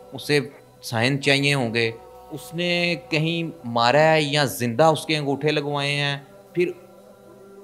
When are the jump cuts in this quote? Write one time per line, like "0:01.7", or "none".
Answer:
0:02.1
0:06.3